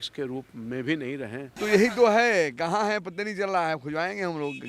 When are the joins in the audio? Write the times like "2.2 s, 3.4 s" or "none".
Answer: 1.5 s